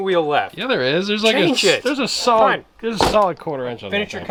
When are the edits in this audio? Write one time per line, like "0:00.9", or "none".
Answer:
none

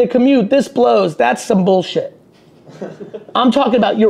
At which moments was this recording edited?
none

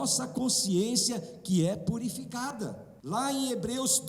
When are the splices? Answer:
0:02.9

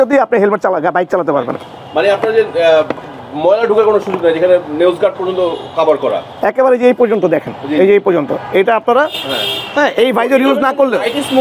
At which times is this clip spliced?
none

